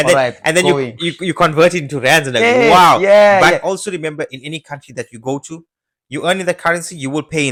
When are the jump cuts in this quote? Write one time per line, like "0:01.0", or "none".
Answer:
none

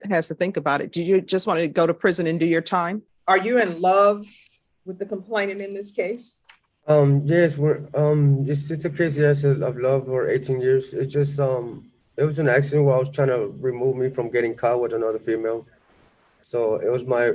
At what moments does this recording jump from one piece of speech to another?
0:03.1

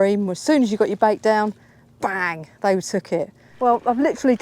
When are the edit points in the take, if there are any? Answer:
0:03.4

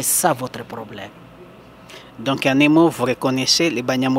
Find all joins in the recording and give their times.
none

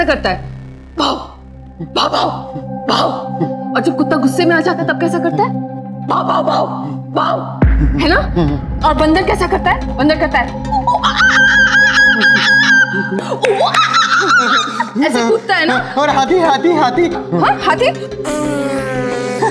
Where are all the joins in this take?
none

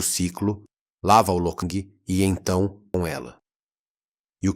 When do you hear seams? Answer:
0:01.6
0:02.9

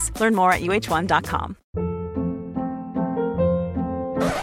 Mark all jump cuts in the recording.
0:01.6

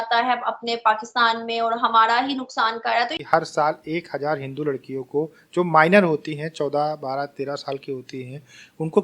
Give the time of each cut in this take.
0:03.2

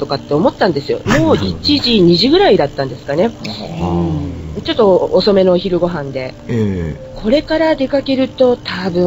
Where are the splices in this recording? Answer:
0:04.4

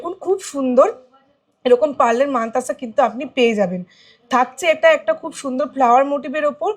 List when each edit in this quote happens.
none

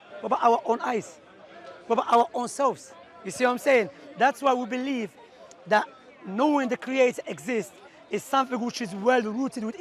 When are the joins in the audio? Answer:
none

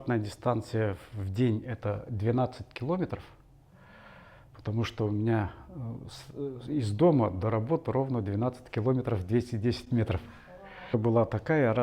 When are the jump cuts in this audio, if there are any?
0:10.9

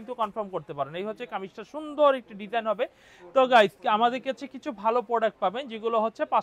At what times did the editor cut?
none

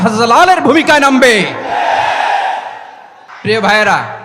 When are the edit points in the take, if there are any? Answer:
none

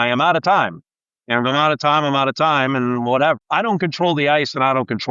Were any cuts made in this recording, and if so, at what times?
0:03.4

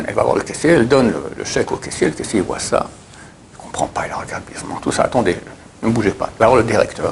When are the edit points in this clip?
none

